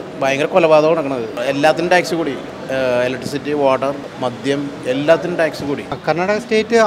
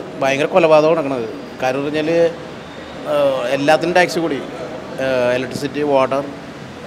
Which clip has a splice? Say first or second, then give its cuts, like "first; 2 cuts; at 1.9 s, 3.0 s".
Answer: first; 4 cuts; at 1.4 s, 2.5 s, 4.1 s, 6.0 s